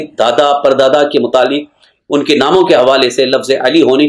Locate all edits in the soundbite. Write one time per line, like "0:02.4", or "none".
none